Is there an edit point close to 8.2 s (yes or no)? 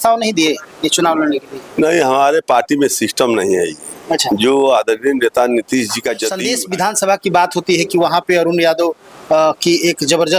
no